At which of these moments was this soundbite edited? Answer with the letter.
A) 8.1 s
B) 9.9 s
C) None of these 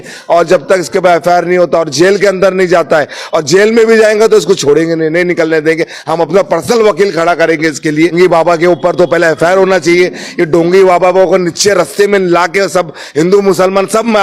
A